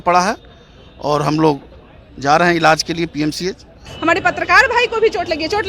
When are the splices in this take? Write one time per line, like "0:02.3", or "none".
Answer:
0:03.9